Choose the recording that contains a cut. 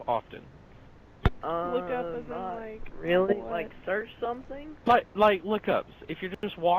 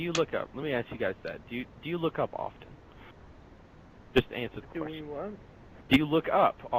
first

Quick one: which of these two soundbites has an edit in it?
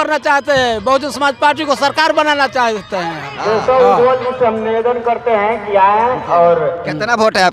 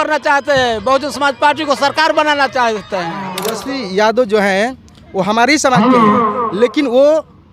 second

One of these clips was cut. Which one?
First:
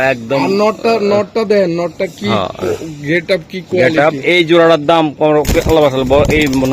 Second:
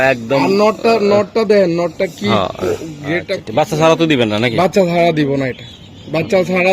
second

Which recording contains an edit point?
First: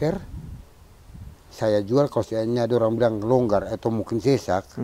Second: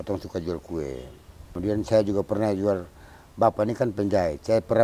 second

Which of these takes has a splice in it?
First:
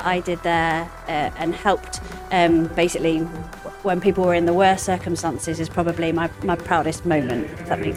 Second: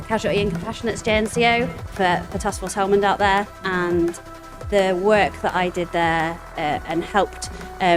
second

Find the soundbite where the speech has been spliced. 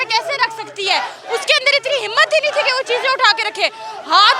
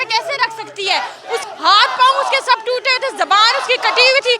second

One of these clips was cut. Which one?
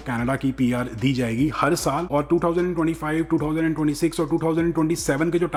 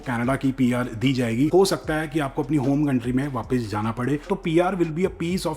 second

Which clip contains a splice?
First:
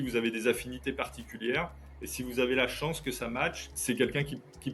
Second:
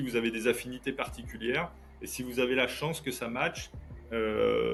first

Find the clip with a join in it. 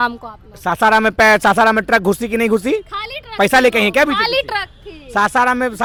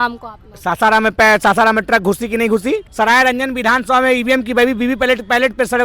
second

